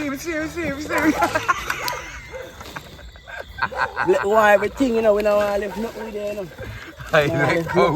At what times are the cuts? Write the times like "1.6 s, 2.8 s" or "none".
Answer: 3.7 s